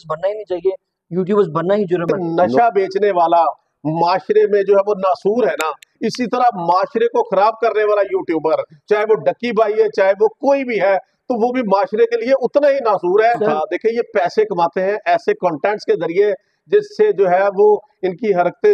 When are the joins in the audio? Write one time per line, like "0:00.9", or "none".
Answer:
0:02.1
0:13.5